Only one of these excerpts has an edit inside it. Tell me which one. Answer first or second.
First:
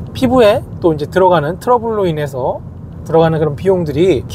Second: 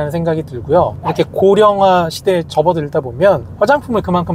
second